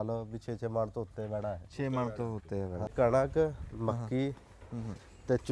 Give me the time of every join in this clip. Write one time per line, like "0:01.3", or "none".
0:02.9